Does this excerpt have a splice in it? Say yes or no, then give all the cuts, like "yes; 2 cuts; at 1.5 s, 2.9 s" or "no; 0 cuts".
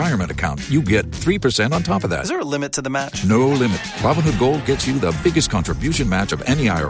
no; 0 cuts